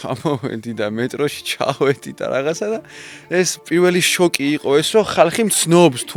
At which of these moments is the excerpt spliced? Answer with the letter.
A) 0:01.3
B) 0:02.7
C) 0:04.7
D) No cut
D